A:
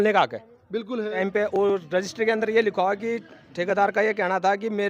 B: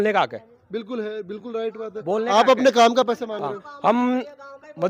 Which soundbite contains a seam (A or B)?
A